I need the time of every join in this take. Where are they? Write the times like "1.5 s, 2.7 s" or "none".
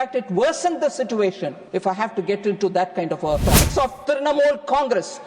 1.5 s, 3.6 s